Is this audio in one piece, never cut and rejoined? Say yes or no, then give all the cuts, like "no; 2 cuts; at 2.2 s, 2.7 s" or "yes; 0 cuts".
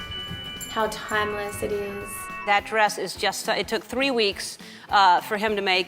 no; 1 cut; at 2.3 s